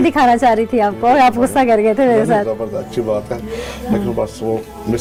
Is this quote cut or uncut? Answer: uncut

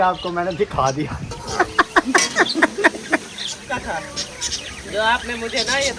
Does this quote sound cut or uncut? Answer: cut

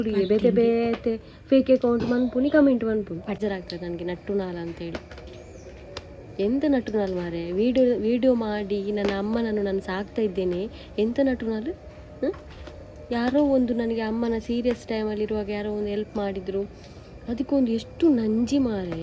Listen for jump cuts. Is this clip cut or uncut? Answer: cut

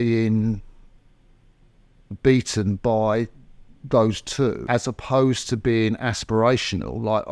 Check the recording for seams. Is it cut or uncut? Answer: cut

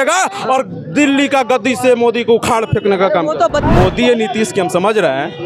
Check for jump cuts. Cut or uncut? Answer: cut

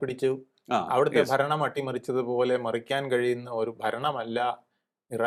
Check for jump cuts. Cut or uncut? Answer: uncut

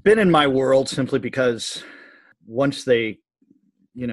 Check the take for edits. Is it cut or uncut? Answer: cut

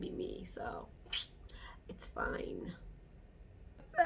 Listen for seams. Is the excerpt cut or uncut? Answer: uncut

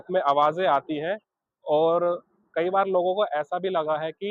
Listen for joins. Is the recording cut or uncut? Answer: uncut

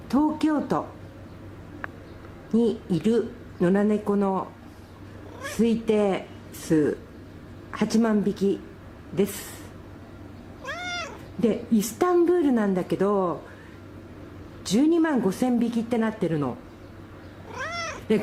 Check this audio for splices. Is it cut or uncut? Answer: cut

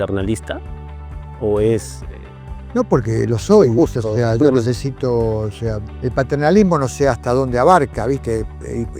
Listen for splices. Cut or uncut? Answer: cut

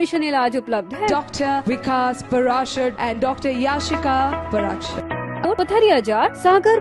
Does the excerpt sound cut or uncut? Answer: cut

